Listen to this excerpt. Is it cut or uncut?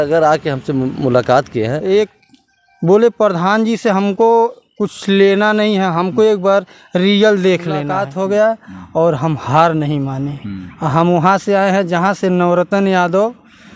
cut